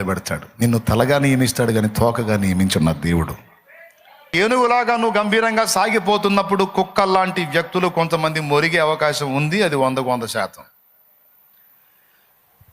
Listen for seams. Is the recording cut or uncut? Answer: cut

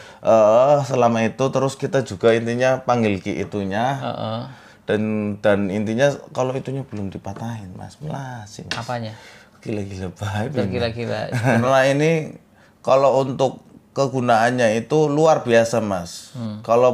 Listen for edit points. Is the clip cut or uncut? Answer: cut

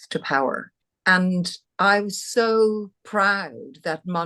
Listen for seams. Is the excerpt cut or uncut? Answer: cut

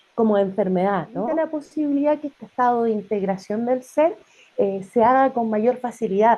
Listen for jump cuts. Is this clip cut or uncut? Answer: cut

